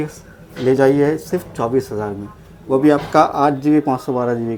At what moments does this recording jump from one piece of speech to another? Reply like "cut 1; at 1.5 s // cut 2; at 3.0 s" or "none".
none